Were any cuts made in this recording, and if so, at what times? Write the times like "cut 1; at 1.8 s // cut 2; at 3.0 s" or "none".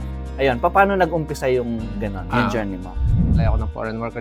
cut 1; at 3.3 s

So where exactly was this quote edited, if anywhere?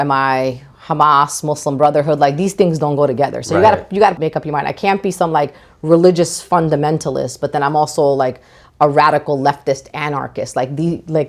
none

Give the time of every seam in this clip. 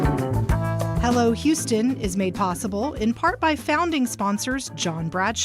cut 1; at 0.9 s

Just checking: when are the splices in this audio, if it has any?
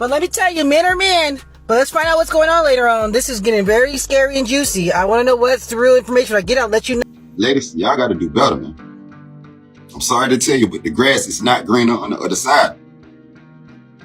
cut 1; at 7.0 s

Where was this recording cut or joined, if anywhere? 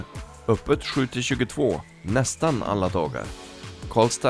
none

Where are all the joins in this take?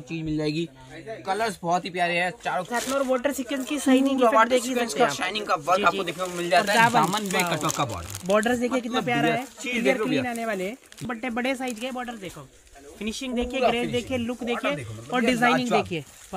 cut 1; at 2.7 s // cut 2; at 11.0 s

